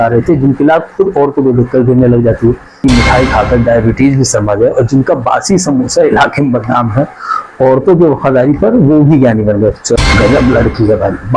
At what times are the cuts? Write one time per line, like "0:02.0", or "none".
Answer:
0:02.8
0:10.0